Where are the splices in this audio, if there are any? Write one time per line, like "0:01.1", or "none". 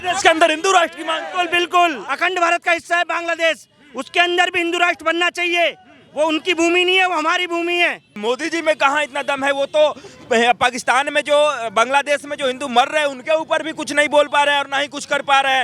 0:02.0
0:08.2

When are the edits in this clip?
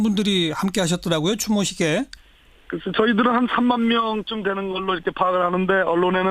0:02.9

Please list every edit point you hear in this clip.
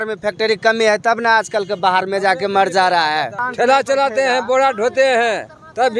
0:03.4

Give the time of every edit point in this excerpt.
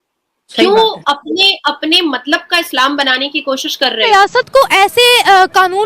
0:04.0

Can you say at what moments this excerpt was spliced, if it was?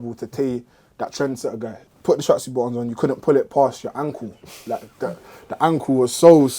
0:01.8

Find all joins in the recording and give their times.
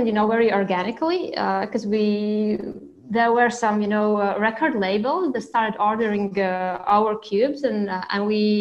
none

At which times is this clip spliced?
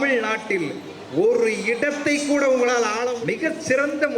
0:03.1

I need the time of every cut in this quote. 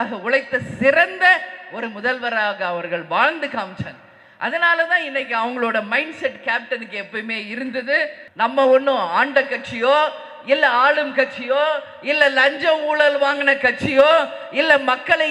0:08.2

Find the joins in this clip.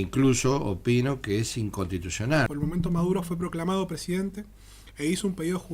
0:02.5

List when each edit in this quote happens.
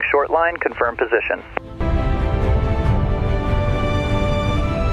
0:01.7

